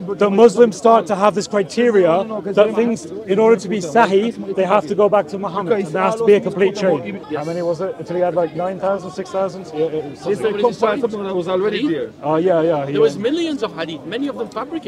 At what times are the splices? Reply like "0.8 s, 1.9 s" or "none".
7.1 s